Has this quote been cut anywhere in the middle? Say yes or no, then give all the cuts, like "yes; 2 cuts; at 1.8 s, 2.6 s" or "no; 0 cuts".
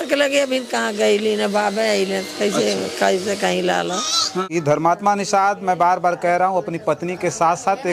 yes; 1 cut; at 4.4 s